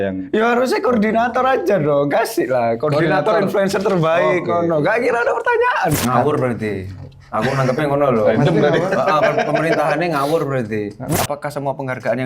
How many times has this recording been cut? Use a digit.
2